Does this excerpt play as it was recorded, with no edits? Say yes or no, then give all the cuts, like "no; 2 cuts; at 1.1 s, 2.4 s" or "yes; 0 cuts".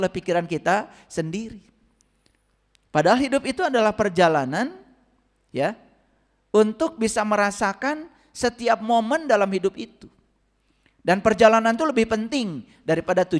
yes; 0 cuts